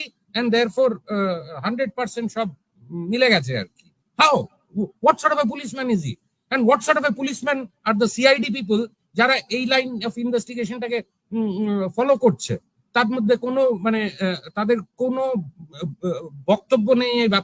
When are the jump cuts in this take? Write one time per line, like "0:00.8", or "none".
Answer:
none